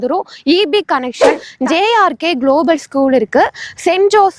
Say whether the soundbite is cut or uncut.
cut